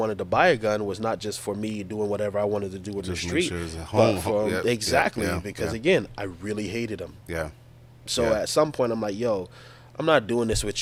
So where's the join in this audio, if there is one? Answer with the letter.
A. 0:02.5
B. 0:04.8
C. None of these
C